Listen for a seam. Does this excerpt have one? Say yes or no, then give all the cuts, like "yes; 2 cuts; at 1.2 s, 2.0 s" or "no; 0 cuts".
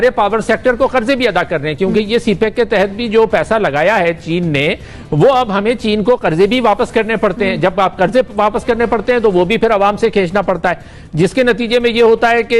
no; 0 cuts